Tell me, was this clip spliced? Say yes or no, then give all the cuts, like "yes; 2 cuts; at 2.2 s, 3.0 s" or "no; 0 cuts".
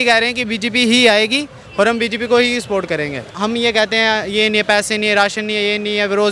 yes; 1 cut; at 3.3 s